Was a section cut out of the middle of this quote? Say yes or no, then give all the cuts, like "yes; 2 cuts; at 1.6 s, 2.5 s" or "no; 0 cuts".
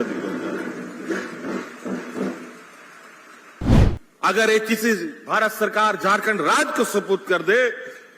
yes; 1 cut; at 3.7 s